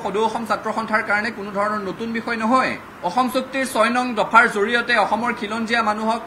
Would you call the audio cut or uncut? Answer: cut